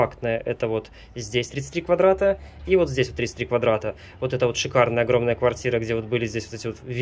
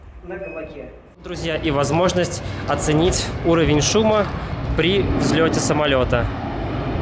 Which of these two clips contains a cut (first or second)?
second